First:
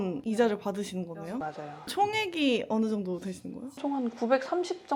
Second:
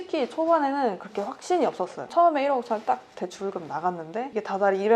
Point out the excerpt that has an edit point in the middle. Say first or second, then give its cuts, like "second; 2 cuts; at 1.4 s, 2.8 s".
second; 1 cut; at 2.0 s